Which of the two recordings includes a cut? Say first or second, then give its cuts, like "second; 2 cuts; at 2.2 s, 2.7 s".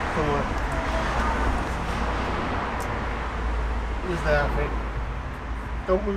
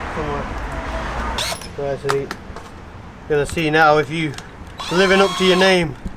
second; 1 cut; at 1.4 s